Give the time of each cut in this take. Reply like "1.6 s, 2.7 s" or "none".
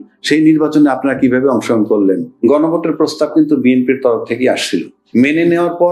2.3 s, 5.0 s